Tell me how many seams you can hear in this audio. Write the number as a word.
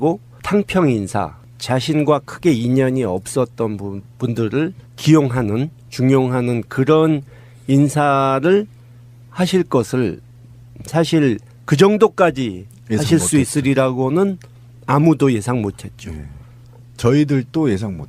one